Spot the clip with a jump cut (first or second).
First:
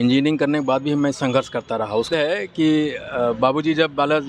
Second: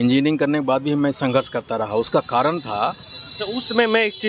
first